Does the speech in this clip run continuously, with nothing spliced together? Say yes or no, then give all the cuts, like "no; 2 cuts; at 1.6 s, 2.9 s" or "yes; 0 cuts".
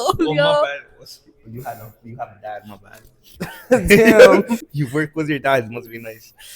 no; 1 cut; at 4.7 s